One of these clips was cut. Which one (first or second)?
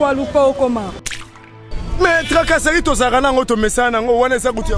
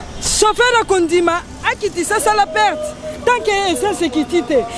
first